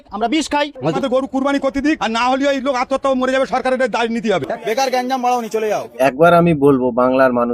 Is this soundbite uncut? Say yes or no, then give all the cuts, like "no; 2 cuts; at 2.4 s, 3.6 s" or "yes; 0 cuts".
no; 3 cuts; at 0.9 s, 4.5 s, 5.9 s